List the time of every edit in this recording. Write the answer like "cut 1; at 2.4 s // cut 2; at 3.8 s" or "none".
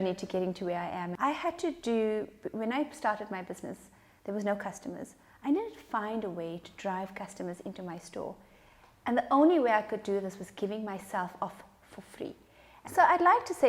cut 1; at 1.1 s // cut 2; at 12.8 s